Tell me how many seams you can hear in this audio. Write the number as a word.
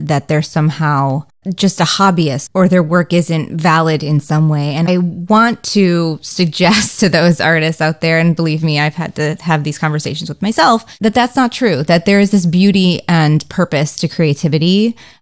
zero